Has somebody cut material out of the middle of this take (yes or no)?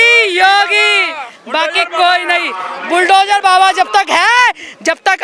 no